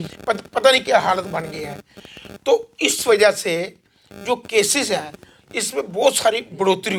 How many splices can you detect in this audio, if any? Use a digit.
0